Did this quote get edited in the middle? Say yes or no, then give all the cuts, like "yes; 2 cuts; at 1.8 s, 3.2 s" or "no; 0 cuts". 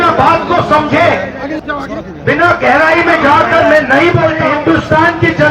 yes; 2 cuts; at 1.6 s, 4.5 s